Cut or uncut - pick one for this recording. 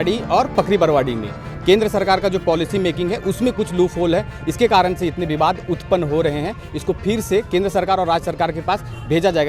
uncut